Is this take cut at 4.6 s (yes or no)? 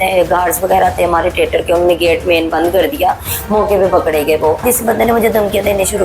yes